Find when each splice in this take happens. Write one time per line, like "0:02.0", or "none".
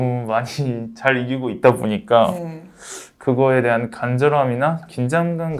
none